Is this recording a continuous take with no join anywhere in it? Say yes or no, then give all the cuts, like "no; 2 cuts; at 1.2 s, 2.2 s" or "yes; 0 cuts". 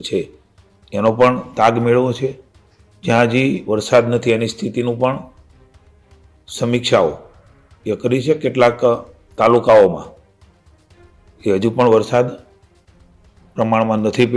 yes; 0 cuts